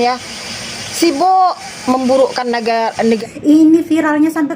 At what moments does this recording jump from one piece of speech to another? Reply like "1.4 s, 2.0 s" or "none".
3.2 s